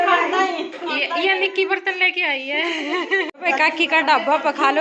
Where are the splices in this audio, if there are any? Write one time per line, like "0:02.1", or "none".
0:03.3